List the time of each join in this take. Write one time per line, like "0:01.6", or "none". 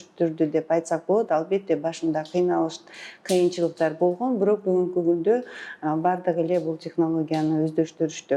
none